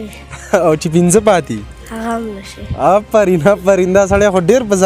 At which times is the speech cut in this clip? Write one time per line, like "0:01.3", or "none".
none